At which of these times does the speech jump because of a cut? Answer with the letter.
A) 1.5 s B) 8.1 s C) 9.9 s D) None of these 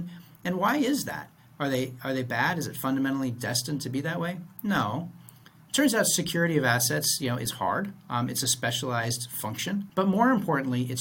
C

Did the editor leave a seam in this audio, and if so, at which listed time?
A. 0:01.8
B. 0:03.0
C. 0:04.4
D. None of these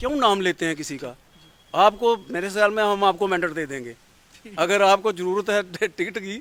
D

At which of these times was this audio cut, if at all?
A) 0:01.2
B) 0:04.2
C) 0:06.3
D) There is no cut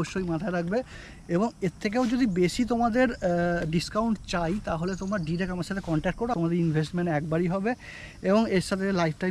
C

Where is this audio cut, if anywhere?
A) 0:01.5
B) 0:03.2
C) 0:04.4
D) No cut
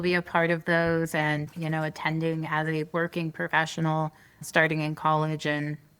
A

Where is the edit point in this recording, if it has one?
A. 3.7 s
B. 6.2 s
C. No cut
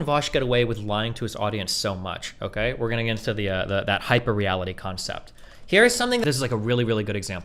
B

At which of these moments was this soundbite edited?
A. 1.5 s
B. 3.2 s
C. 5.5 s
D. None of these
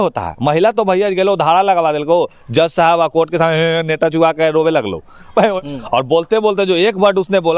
C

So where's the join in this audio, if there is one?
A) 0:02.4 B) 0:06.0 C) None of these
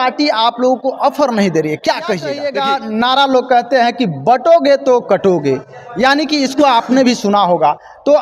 A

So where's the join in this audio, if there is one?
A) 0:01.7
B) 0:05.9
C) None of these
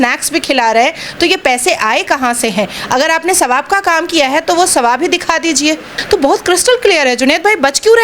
B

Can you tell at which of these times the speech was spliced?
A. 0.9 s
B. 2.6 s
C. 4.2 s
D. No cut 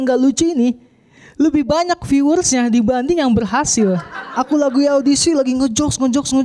C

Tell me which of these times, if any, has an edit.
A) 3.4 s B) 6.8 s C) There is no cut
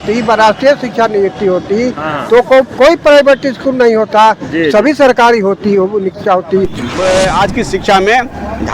B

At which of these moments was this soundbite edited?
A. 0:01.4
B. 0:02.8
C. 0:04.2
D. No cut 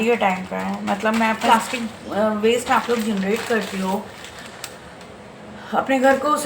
A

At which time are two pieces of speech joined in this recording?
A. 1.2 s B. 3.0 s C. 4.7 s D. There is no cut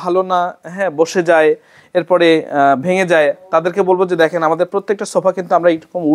D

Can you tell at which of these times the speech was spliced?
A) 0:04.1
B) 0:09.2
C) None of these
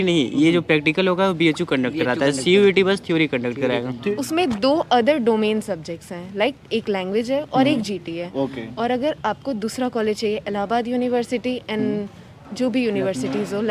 A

